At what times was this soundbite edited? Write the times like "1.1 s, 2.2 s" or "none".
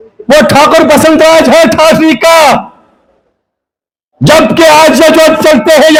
none